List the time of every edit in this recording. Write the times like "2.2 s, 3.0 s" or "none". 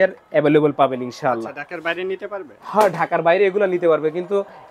none

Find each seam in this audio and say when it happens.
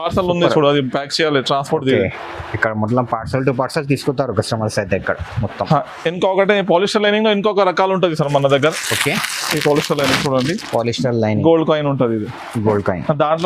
none

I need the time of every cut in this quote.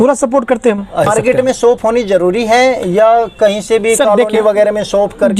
1.1 s

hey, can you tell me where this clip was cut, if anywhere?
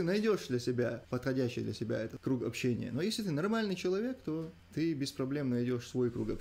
1.0 s, 2.1 s, 4.6 s

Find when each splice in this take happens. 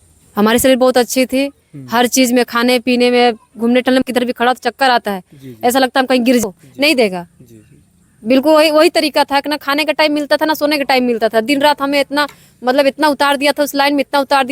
4.0 s, 6.4 s

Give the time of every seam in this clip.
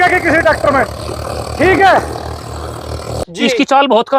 3.2 s

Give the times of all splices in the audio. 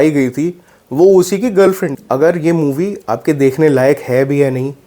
1.9 s

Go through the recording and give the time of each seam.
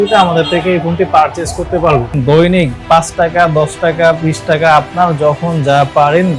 2.2 s

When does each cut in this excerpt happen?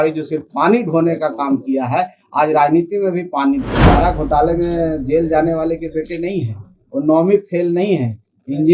3.8 s

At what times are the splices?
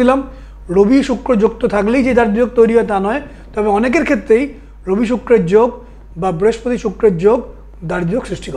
none

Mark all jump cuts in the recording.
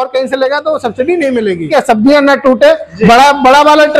1.7 s

